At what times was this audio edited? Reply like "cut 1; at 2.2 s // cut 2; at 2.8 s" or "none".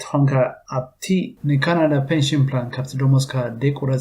cut 1; at 1.2 s

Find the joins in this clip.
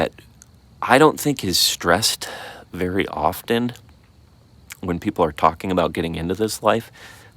none

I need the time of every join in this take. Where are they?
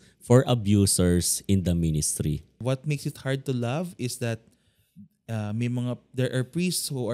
cut 1; at 2.6 s

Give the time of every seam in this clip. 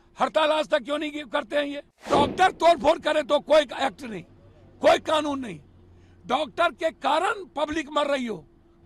cut 1; at 2.1 s

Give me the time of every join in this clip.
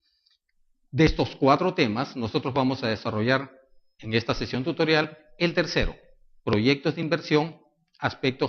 cut 1; at 1.2 s

